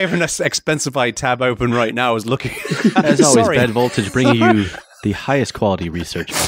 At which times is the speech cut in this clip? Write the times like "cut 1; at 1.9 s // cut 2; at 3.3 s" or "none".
none